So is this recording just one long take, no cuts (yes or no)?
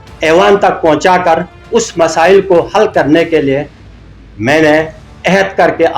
no